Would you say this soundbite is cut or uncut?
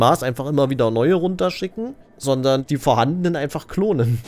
cut